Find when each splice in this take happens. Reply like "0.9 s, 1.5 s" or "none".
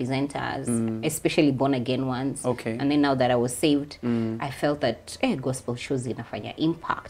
none